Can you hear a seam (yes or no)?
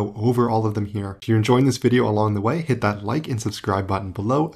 yes